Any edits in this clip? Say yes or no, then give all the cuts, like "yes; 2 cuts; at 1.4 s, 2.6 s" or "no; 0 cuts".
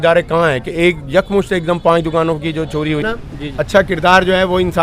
yes; 1 cut; at 3.0 s